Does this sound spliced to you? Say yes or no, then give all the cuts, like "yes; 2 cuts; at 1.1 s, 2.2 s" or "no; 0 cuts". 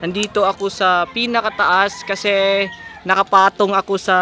no; 0 cuts